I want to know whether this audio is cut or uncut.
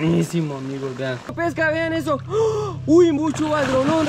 cut